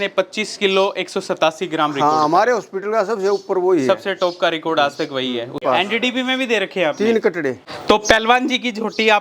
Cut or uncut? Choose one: cut